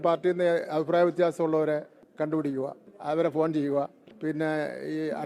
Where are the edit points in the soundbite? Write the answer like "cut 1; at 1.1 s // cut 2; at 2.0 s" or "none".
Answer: cut 1; at 2.0 s // cut 2; at 2.9 s // cut 3; at 4.0 s